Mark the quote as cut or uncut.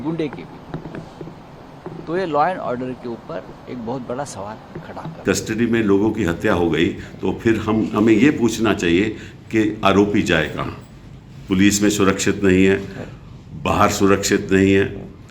uncut